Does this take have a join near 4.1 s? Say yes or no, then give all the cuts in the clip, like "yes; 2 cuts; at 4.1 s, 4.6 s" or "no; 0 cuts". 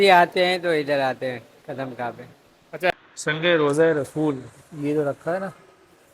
no; 1 cut; at 2.9 s